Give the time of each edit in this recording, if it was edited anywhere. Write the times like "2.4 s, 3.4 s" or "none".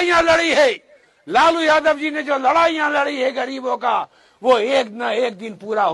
none